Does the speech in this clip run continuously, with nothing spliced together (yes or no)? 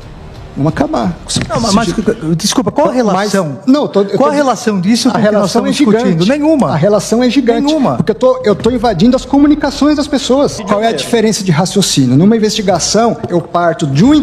no